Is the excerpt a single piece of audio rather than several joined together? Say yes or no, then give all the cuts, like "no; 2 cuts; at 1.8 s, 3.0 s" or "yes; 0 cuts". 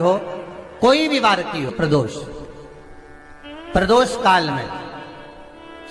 no; 1 cut; at 1.7 s